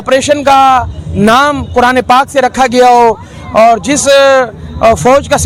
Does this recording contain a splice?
no; 0 cuts

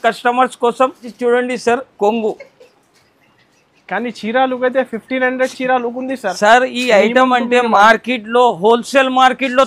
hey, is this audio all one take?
no; 1 cut; at 1.1 s

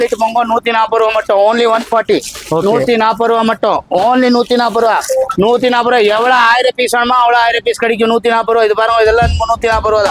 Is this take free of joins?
yes; 0 cuts

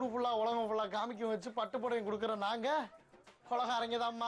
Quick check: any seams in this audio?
no; 0 cuts

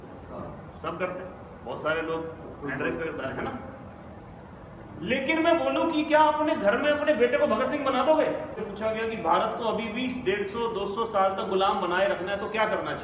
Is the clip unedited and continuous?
no; 1 cut; at 8.6 s

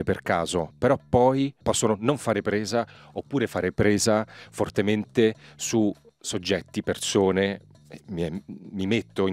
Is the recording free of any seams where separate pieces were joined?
no; 1 cut; at 1.6 s

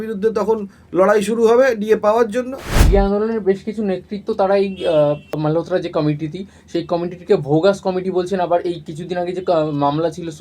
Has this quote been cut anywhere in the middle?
yes; 2 cuts; at 2.8 s, 5.3 s

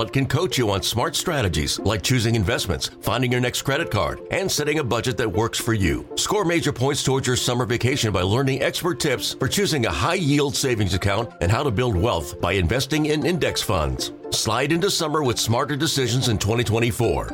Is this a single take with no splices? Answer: yes; 0 cuts

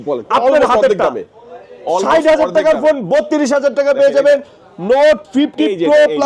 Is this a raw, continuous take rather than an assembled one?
yes; 0 cuts

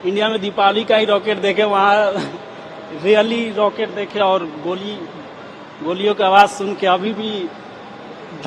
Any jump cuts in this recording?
no; 0 cuts

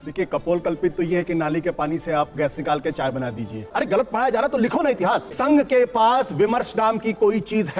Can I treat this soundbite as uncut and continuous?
no; 2 cuts; at 3.7 s, 5.3 s

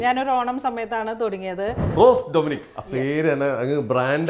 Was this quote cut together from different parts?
yes; 1 cut; at 1.8 s

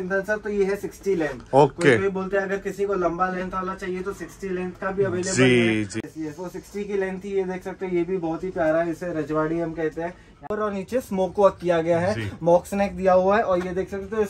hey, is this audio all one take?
no; 2 cuts; at 6.0 s, 10.5 s

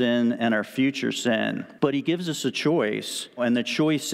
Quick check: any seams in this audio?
yes; 2 cuts; at 1.7 s, 3.4 s

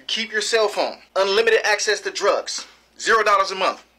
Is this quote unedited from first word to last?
no; 1 cut; at 1.0 s

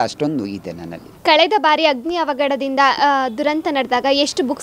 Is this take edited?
yes; 1 cut; at 1.0 s

